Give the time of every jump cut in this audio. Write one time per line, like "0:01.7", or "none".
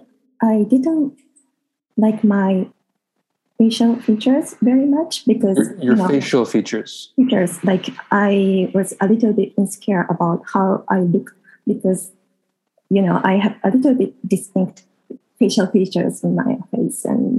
0:02.7